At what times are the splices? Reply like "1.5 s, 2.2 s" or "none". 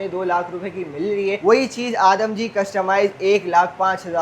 none